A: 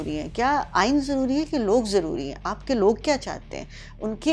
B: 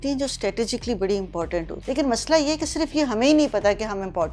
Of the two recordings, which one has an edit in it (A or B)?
B